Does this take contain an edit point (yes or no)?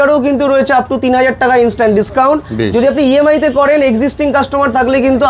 no